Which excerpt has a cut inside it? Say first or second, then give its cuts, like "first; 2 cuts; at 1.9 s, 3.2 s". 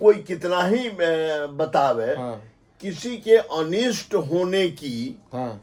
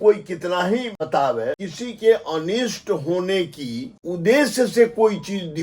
second; 3 cuts; at 0.9 s, 1.6 s, 3.9 s